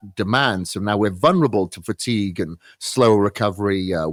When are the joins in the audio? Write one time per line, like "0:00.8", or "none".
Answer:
none